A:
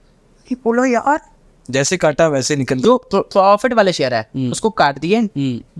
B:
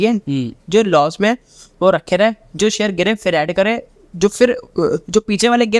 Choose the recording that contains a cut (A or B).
A